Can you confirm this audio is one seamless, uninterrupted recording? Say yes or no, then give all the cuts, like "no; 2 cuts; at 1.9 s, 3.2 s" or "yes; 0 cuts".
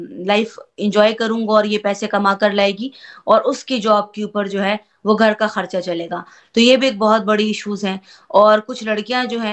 yes; 0 cuts